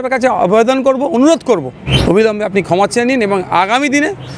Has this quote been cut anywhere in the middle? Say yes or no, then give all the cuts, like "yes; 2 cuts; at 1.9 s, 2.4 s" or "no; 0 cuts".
yes; 1 cut; at 1.9 s